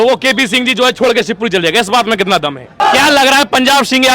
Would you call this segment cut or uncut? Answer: cut